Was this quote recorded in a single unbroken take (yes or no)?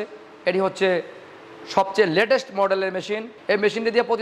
no